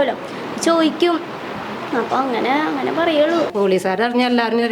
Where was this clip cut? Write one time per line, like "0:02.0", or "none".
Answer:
0:03.5